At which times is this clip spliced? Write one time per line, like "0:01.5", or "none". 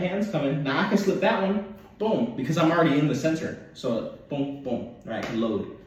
none